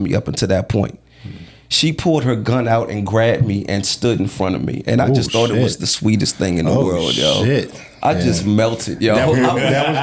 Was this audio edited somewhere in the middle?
no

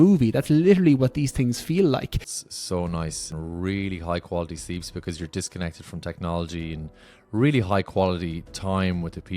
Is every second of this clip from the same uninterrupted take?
no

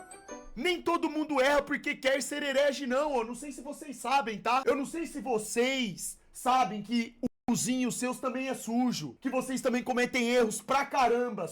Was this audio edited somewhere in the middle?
yes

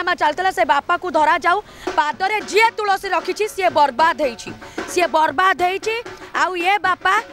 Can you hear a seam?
yes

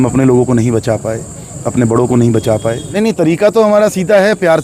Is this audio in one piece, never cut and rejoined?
no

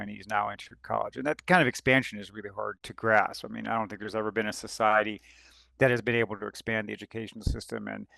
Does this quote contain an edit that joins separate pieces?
yes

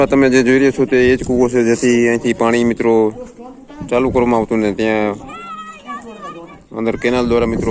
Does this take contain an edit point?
no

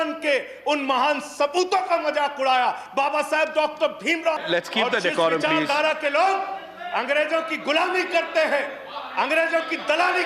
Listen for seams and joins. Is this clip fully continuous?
no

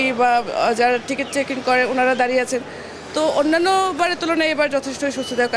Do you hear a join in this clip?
no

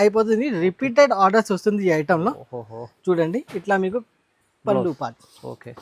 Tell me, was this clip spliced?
no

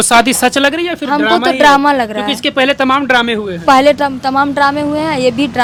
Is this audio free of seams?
yes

